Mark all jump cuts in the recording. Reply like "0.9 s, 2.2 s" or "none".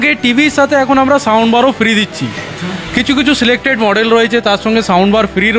none